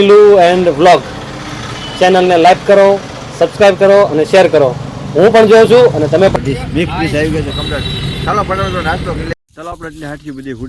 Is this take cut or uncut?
cut